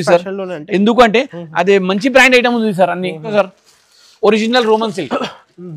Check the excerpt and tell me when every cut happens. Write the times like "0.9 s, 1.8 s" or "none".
3.3 s